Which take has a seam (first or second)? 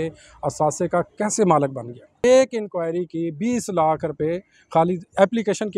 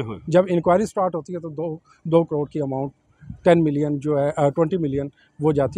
first